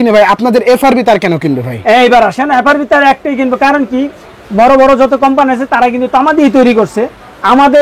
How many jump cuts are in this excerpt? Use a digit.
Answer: 0